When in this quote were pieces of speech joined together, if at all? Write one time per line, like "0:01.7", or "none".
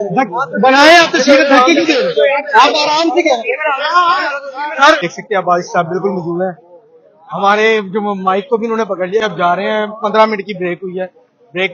0:05.1
0:09.2